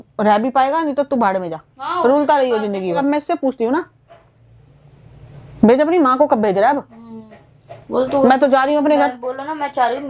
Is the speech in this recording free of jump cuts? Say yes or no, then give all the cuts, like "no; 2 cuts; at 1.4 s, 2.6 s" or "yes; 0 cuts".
no; 1 cut; at 3.0 s